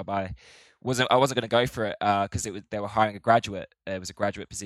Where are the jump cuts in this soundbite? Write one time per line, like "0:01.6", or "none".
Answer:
none